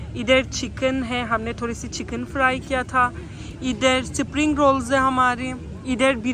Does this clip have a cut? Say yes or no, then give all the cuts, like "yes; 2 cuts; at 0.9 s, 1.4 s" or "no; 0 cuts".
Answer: no; 0 cuts